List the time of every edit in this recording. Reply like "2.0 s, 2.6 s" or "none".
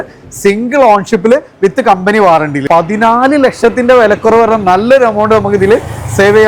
2.6 s